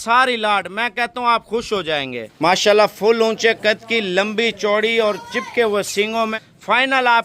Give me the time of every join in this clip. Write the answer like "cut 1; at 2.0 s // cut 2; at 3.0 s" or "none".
cut 1; at 6.3 s